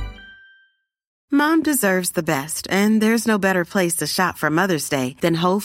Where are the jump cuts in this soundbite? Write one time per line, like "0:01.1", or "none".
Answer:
0:01.1